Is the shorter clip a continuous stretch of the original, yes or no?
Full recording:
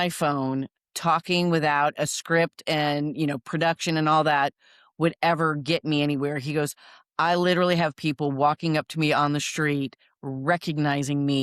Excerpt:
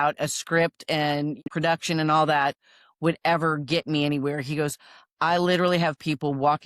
no